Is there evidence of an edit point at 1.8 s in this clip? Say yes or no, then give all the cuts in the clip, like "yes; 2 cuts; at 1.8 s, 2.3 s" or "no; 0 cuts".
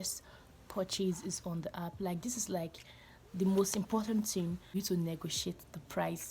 no; 1 cut; at 4.7 s